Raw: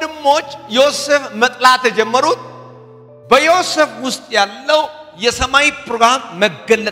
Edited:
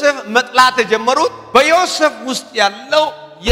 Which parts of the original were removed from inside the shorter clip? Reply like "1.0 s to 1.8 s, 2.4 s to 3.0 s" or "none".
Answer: 2.5 s to 3.2 s